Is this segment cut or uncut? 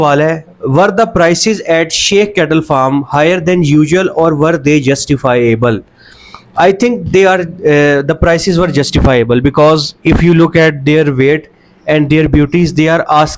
uncut